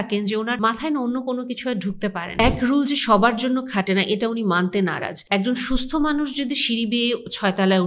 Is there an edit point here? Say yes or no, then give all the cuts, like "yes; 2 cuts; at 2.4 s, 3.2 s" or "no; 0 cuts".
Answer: yes; 3 cuts; at 0.8 s, 2.4 s, 5.4 s